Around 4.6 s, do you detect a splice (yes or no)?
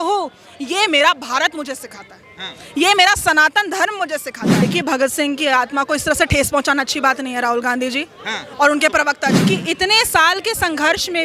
yes